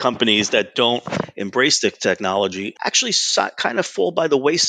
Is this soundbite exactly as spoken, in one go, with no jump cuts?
yes; 0 cuts

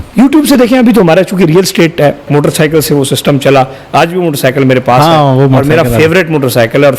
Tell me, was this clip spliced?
yes; 1 cut; at 2.3 s

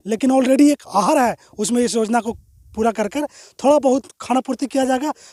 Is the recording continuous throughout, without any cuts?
yes; 0 cuts

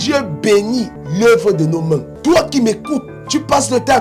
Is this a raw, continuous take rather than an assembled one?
no; 2 cuts; at 1.0 s, 2.1 s

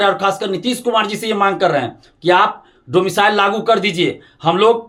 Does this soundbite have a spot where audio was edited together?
no; 0 cuts

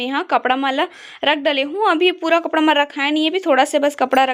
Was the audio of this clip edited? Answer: no; 0 cuts

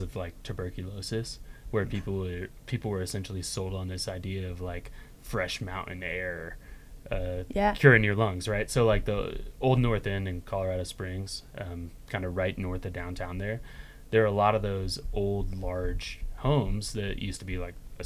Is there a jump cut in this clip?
no; 0 cuts

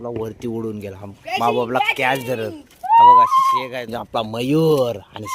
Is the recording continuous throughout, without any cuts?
no; 1 cut; at 3.9 s

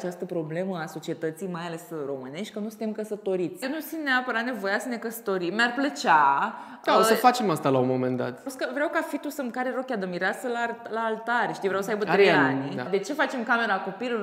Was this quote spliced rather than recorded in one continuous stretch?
yes; 3 cuts; at 3.6 s, 8.5 s, 12.9 s

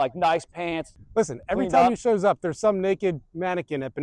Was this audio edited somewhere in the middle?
yes; 1 cut; at 0.9 s

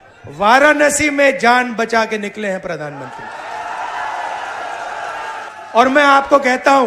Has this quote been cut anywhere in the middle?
yes; 1 cut; at 5.5 s

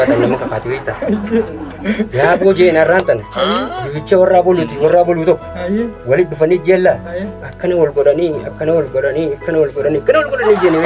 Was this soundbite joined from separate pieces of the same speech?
no; 0 cuts

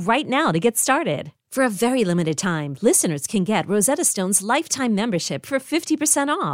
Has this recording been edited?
no; 0 cuts

